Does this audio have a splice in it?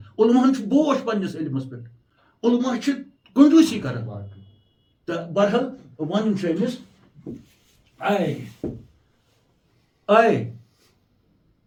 no; 0 cuts

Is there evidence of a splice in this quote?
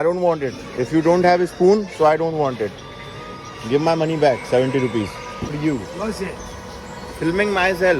yes; 1 cut; at 5.5 s

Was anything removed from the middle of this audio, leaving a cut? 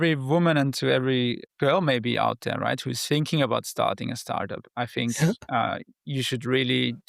yes; 1 cut; at 1.5 s

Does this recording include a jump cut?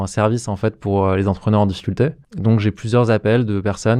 yes; 1 cut; at 2.3 s

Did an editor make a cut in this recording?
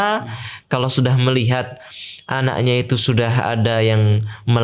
no; 0 cuts

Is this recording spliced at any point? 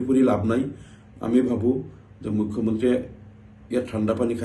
no; 0 cuts

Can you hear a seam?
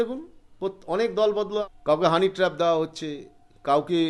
yes; 1 cut; at 1.6 s

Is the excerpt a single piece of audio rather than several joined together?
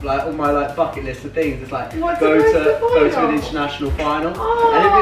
yes; 0 cuts

